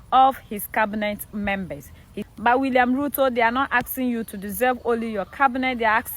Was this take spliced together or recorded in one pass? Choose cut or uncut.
cut